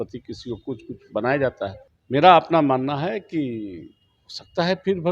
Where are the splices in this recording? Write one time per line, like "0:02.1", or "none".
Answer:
0:01.9

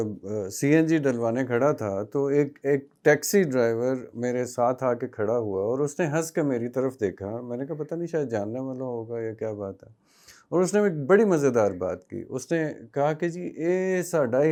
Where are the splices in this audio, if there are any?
none

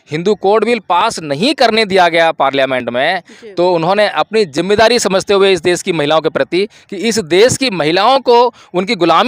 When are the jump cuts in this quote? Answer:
none

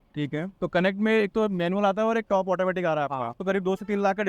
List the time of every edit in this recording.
0:03.4

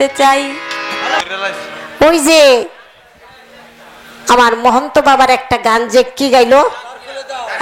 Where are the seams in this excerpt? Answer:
0:01.2

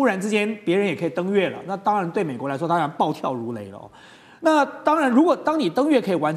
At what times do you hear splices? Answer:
none

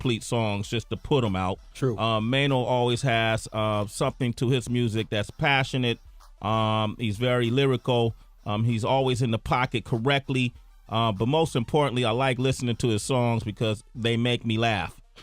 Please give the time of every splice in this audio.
0:13.1

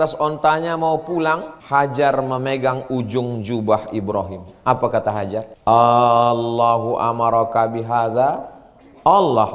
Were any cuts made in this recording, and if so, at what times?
0:01.5
0:05.5

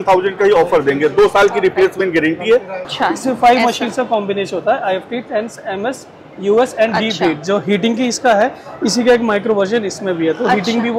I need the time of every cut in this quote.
0:02.9

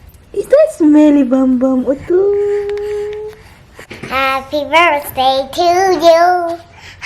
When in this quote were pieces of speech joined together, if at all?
0:03.7

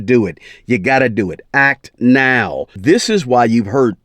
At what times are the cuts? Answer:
0:02.7

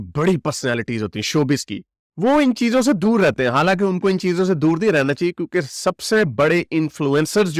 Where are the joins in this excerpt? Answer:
none

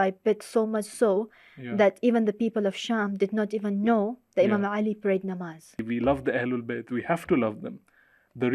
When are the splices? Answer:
0:05.8

